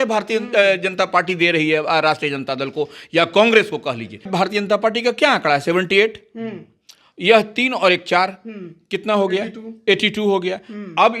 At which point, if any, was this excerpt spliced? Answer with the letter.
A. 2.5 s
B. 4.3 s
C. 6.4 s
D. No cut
B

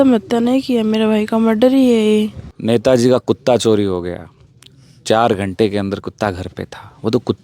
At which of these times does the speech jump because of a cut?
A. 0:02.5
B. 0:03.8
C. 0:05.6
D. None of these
A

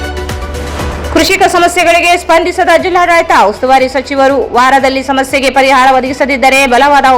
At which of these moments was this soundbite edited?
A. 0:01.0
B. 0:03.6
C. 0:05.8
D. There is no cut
A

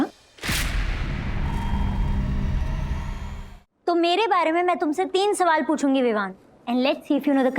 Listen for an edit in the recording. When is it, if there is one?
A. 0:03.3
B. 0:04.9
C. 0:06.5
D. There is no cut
A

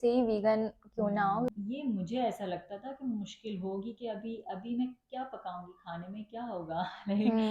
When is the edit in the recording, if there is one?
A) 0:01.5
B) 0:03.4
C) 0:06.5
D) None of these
A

